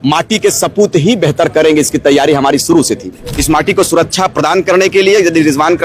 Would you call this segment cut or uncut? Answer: cut